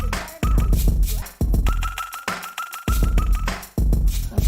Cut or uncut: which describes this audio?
cut